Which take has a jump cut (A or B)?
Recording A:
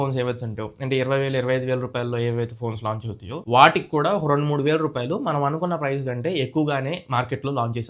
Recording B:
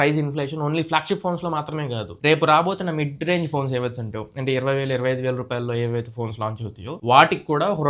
B